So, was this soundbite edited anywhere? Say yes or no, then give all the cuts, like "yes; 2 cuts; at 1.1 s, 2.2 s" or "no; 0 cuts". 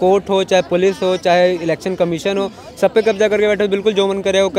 no; 0 cuts